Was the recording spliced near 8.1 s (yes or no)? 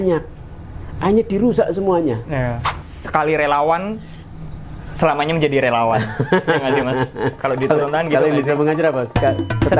no